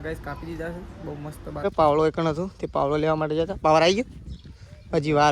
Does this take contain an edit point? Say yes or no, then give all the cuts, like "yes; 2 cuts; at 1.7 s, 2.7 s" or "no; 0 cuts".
yes; 1 cut; at 1.6 s